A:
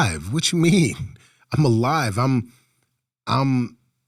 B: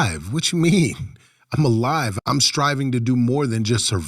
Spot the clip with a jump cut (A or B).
B